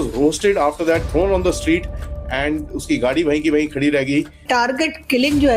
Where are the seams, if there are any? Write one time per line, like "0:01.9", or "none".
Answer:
0:04.4